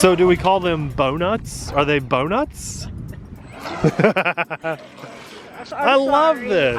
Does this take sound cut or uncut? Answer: uncut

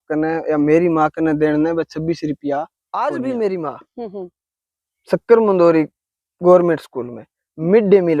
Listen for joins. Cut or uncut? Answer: cut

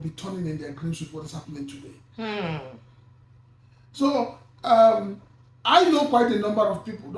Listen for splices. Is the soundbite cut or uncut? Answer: uncut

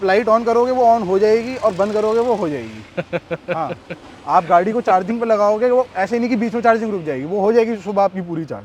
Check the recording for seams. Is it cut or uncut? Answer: uncut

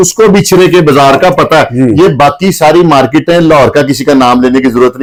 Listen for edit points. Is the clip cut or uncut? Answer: uncut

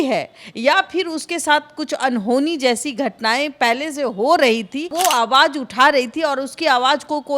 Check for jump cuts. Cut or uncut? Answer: cut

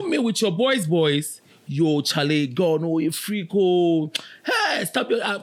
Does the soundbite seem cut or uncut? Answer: uncut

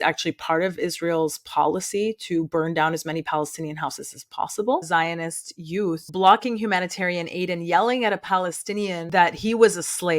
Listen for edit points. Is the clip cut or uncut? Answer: cut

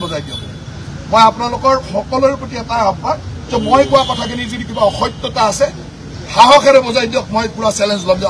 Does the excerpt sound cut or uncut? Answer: uncut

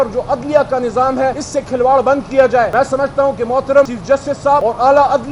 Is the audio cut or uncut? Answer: cut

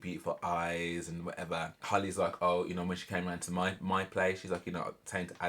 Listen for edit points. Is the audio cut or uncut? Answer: cut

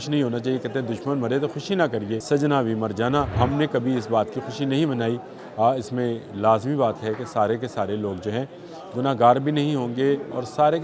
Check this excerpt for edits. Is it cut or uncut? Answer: cut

